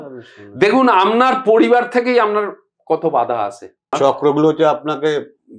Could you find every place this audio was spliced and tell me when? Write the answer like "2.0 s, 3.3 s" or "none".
4.0 s